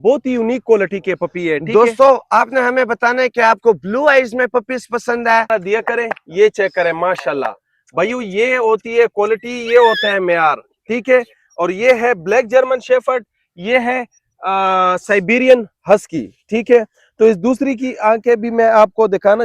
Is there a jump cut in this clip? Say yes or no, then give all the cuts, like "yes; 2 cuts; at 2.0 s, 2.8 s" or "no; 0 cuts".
yes; 1 cut; at 5.5 s